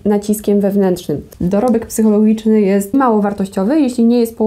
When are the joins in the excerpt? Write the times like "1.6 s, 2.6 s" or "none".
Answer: 1.3 s, 2.9 s